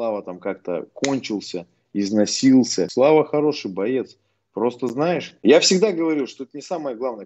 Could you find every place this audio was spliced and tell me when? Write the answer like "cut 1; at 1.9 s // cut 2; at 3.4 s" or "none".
cut 1; at 2.8 s // cut 2; at 5.3 s